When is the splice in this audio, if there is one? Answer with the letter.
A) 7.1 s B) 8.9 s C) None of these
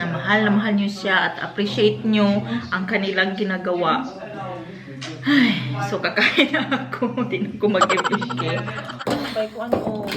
B